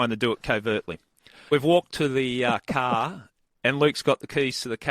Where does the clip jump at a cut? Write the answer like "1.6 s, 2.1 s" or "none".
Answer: 1.5 s